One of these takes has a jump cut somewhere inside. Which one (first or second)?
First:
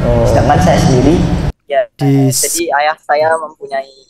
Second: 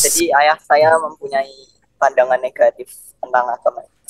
first